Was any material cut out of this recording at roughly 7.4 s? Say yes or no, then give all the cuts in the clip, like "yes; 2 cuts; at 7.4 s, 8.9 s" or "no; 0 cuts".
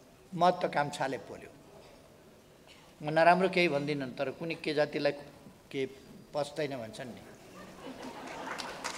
no; 1 cut; at 1.8 s